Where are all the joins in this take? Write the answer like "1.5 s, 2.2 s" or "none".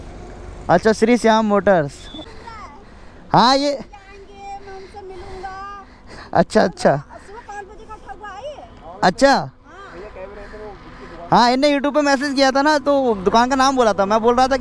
2.0 s